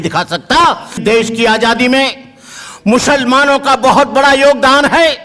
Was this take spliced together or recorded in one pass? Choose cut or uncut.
cut